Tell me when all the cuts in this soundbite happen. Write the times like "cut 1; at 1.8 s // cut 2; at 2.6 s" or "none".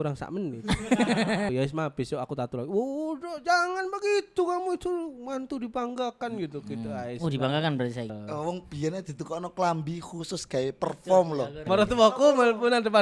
cut 1; at 1.5 s // cut 2; at 8.2 s // cut 3; at 11.6 s